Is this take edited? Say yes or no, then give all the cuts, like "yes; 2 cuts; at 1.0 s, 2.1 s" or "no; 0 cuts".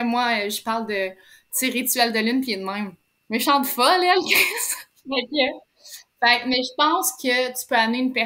no; 0 cuts